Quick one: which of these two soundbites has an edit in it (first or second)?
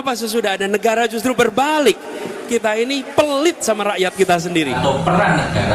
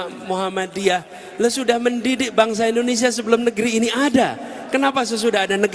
first